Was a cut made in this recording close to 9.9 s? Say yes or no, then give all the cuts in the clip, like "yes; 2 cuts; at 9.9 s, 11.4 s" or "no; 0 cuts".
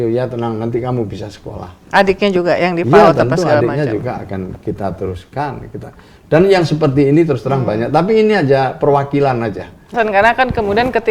yes; 1 cut; at 9.9 s